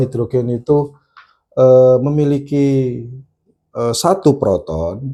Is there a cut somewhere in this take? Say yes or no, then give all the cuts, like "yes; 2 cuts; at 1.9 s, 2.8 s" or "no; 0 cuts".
no; 0 cuts